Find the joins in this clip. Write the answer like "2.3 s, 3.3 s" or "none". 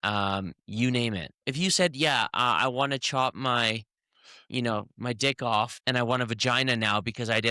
1.5 s, 5.8 s